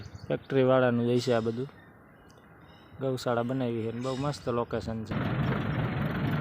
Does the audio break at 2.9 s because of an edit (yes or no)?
no